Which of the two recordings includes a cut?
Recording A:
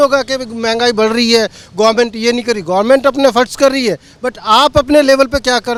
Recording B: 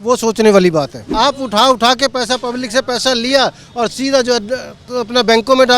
B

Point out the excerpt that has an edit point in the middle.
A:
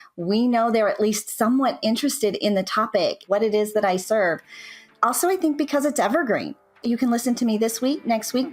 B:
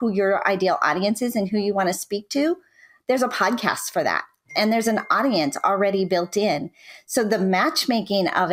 A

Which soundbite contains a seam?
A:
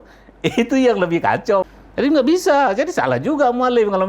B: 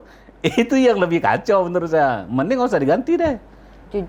A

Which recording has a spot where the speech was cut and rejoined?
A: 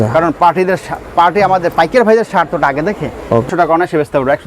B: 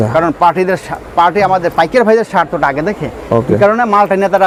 A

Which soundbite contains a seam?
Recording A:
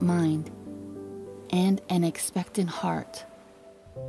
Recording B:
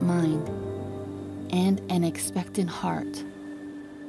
B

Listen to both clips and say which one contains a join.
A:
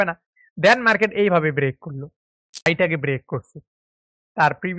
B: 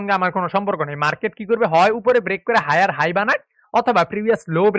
A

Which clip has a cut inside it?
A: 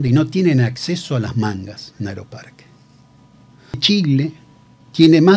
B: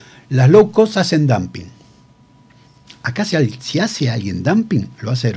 A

